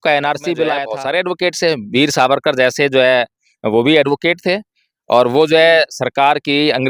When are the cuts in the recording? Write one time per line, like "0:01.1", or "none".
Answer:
0:00.9